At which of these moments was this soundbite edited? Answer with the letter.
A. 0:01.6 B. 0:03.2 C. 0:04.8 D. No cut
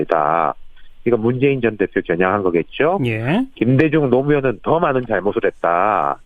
C